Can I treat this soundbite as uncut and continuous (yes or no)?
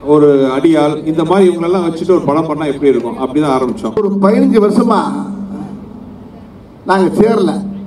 no